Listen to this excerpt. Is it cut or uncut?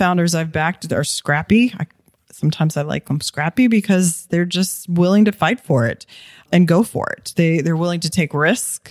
uncut